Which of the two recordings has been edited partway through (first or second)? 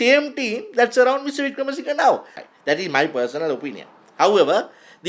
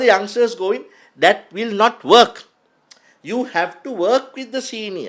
first